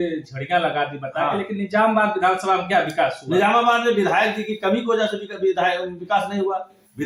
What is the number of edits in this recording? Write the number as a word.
zero